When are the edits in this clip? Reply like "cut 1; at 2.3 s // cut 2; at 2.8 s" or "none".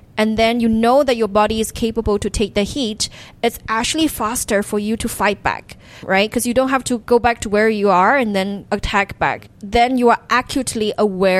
cut 1; at 6.0 s // cut 2; at 7.0 s // cut 3; at 8.6 s // cut 4; at 9.5 s